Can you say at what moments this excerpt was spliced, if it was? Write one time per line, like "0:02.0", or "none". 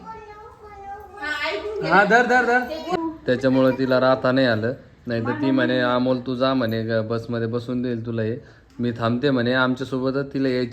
0:02.9